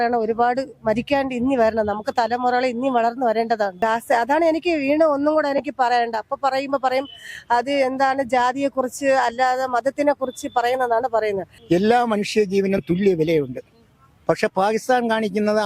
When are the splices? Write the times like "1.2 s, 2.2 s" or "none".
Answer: 3.8 s, 11.5 s